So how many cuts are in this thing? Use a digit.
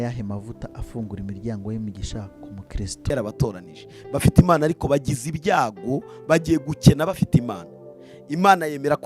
1